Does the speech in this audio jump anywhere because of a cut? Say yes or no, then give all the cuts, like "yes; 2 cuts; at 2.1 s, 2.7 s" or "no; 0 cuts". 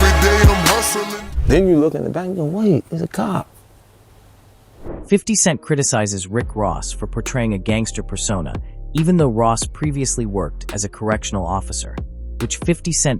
no; 0 cuts